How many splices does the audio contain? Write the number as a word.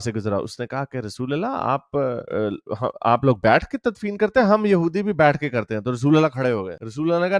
zero